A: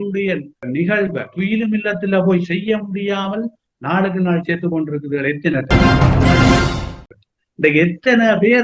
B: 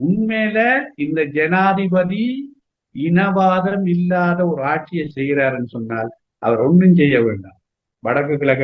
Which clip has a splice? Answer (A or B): A